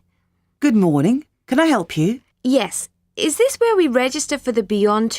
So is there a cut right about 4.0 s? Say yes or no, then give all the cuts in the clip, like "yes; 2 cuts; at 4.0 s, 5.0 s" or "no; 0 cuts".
no; 1 cut; at 2.3 s